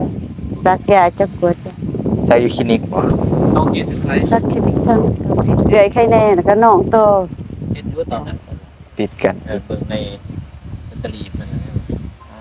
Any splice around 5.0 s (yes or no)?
yes